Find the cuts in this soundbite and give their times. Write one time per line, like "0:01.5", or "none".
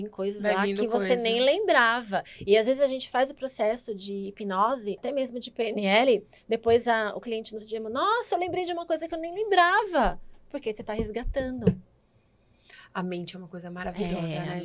0:05.0